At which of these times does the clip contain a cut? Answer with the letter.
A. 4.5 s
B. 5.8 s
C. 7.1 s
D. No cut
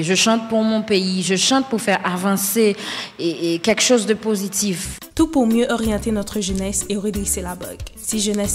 D